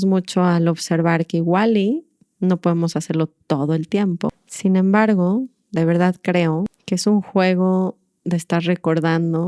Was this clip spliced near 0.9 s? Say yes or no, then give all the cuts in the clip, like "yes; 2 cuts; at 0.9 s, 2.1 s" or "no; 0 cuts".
no; 2 cuts; at 4.3 s, 6.8 s